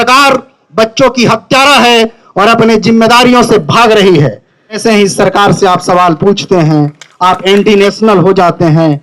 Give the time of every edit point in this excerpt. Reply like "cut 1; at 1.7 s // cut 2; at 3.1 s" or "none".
cut 1; at 4.8 s